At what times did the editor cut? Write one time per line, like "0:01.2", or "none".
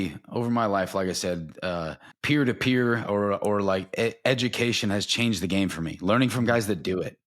0:02.1